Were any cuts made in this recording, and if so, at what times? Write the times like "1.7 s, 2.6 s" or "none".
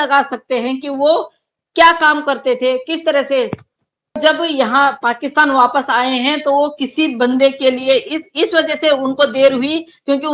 4.1 s